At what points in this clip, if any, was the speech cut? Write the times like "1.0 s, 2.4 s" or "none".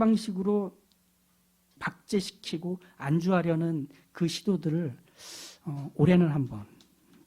1.8 s